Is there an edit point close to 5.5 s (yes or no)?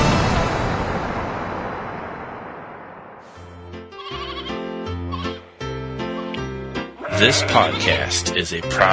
no